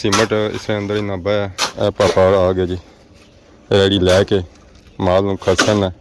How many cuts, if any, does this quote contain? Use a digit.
1